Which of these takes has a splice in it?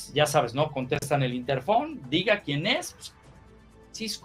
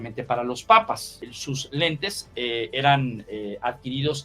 second; 1 cut; at 1.2 s

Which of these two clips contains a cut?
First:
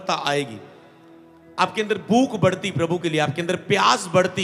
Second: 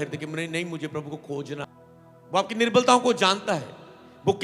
second; 1 cut; at 1.7 s

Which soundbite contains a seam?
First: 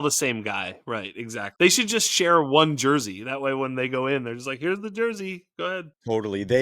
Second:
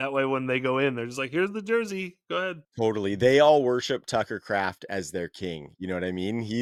first; 1 cut; at 1.3 s

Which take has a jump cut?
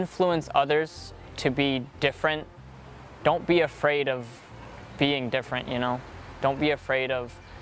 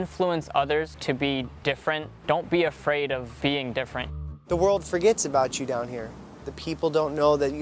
second; 5 cuts; at 0.9 s, 2.1 s, 3.3 s, 4.2 s, 6.5 s

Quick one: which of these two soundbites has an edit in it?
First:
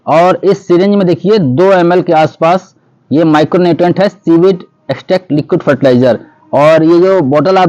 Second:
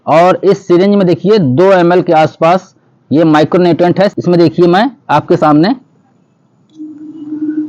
second; 1 cut; at 4.2 s

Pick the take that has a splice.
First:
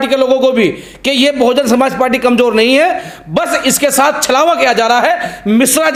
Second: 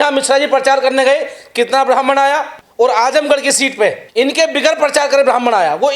second; 2 cuts; at 2.6 s, 4.0 s

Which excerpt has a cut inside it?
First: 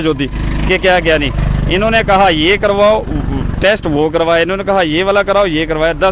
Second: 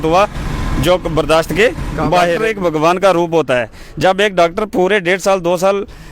second; 1 cut; at 2.4 s

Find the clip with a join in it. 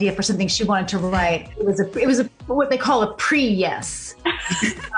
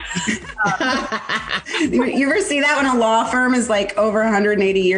second; 1 cut; at 1.6 s

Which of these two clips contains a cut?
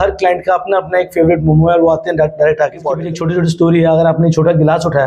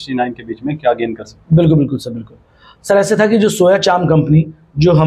first; 1 cut; at 3.2 s

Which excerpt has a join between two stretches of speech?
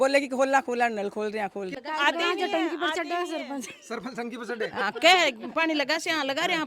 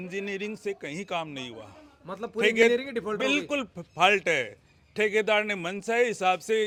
first; 1 cut; at 1.7 s

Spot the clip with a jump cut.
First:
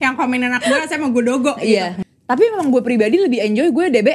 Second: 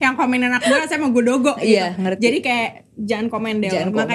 first; 1 cut; at 2.0 s

